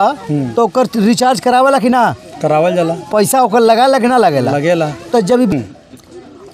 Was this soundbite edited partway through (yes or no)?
yes